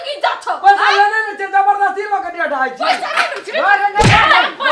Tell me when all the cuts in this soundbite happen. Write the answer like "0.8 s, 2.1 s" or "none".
none